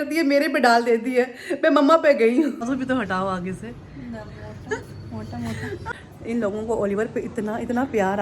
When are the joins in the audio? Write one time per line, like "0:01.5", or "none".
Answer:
0:02.7
0:05.9